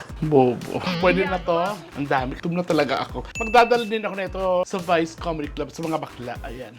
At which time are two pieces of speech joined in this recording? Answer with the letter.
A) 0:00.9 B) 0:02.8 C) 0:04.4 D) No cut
A